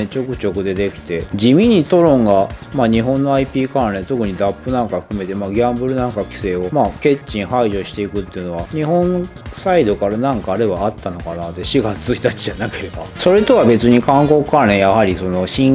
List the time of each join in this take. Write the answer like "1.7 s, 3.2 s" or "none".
none